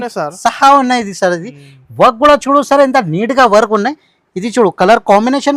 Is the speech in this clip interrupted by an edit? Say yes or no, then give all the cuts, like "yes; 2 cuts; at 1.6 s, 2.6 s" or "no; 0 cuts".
no; 0 cuts